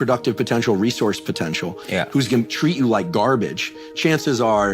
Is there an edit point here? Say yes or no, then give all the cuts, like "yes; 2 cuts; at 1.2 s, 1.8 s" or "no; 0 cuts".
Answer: no; 0 cuts